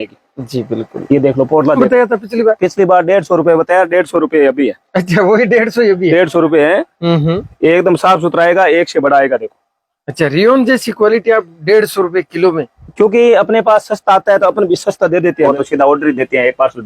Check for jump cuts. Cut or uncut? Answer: cut